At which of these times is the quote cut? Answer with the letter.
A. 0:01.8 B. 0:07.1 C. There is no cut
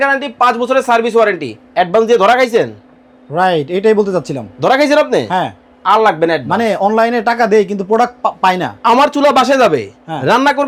C